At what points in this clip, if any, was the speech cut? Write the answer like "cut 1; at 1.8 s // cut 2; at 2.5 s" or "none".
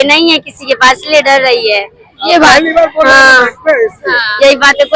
none